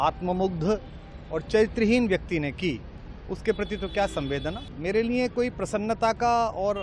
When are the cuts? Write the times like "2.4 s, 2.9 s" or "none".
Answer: 4.6 s